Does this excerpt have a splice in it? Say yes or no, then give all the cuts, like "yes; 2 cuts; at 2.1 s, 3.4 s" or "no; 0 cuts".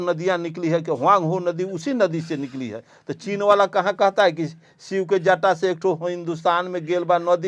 no; 0 cuts